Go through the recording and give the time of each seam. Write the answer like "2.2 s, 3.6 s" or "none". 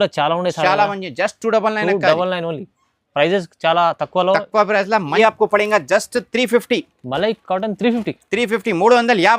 5.1 s